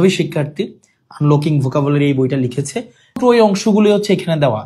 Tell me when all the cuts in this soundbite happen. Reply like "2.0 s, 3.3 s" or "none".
3.2 s

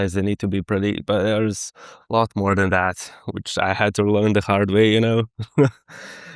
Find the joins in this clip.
none

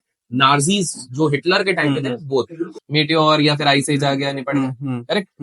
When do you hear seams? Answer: 2.8 s

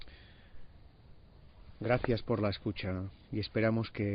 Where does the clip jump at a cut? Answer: 2.7 s

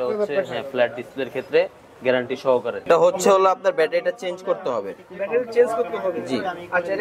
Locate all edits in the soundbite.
2.8 s

